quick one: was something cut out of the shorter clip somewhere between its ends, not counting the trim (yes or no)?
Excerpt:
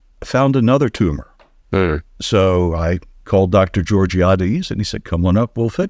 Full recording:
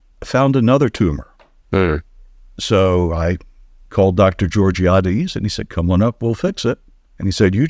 yes